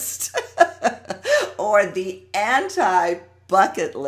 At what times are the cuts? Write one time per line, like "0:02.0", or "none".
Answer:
none